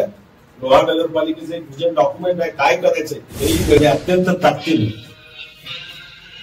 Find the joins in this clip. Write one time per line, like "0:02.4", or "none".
0:03.8

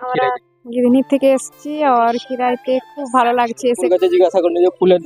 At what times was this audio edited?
0:03.8

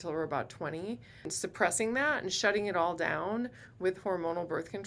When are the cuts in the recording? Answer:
0:01.3

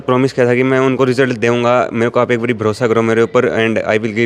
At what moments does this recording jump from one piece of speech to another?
none

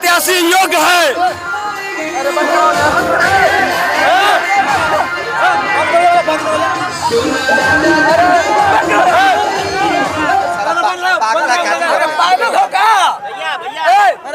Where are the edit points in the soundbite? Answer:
none

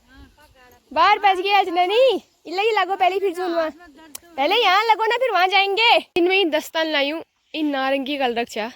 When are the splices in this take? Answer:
0:06.1

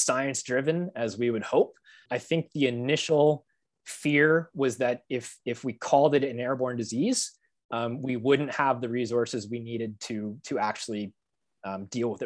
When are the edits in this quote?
0:02.0

